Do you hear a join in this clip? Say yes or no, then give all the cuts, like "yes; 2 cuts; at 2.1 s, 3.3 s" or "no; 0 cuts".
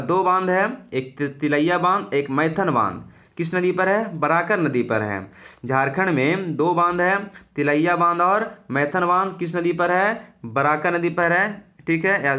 no; 0 cuts